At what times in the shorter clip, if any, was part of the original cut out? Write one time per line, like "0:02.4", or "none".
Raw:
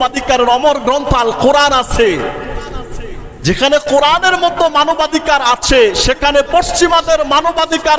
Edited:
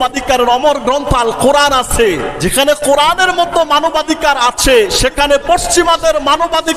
0:02.3